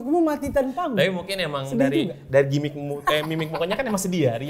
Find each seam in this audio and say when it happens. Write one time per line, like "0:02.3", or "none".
none